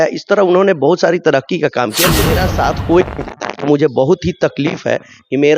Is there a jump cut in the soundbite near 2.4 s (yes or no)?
yes